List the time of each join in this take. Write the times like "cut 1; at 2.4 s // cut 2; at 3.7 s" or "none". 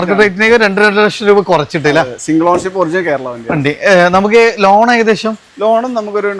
none